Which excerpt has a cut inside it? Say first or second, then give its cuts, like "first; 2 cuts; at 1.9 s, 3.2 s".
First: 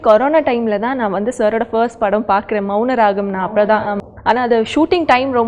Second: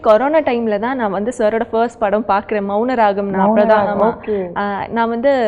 first; 1 cut; at 4.0 s